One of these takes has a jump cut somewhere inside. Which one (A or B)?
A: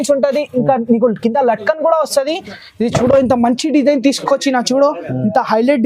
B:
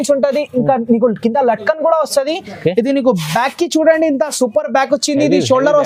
A